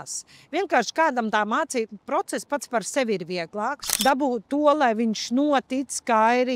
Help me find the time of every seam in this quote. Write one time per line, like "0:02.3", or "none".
0:03.9